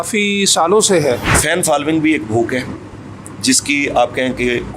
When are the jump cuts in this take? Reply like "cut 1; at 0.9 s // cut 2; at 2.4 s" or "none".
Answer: cut 1; at 1.4 s